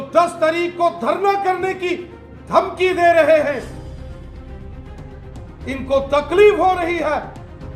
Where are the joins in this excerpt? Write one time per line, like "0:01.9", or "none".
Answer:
0:03.7
0:05.6